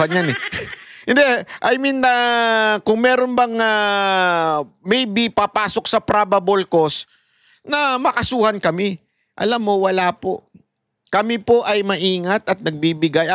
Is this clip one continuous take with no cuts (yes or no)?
yes